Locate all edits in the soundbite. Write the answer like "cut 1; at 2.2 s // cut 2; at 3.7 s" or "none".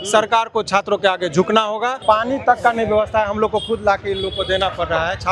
cut 1; at 2.0 s